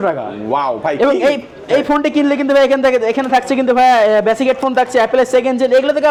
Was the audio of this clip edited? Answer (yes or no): no